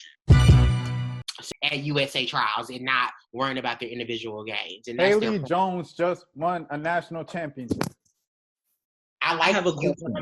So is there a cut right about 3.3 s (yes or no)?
no